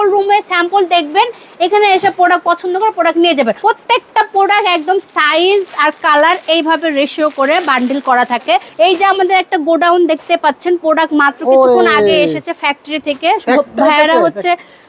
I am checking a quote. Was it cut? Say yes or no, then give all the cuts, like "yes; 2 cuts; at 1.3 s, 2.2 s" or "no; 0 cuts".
yes; 2 cuts; at 3.6 s, 8.7 s